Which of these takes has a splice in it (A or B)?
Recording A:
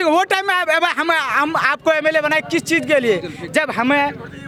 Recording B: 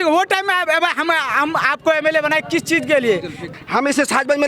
B